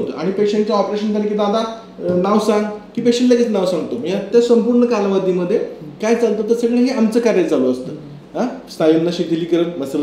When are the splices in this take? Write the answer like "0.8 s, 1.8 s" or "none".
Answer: none